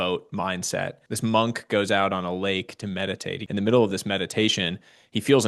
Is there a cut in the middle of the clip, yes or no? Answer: yes